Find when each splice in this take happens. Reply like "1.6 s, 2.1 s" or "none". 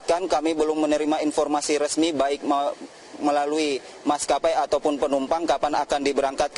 none